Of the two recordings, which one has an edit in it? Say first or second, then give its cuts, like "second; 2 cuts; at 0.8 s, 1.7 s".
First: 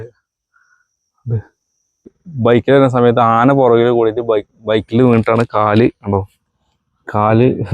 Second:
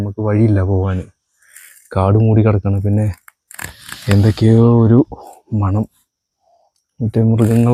first; 1 cut; at 2.2 s